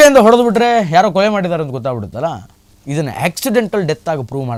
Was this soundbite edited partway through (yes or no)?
no